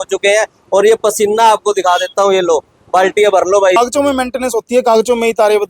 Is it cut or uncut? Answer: cut